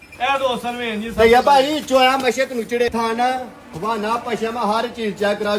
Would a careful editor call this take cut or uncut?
cut